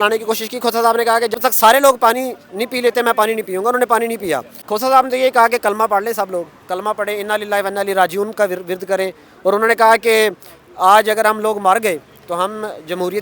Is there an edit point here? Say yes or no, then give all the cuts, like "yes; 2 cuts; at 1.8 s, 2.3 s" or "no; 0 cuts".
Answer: yes; 2 cuts; at 1.3 s, 4.6 s